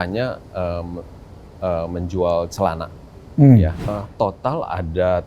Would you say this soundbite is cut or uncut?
cut